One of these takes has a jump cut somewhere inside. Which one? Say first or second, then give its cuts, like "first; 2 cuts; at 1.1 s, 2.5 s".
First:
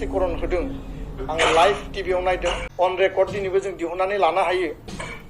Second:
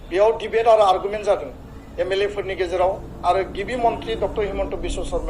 first; 1 cut; at 2.6 s